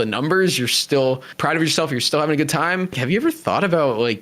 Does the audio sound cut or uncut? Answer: cut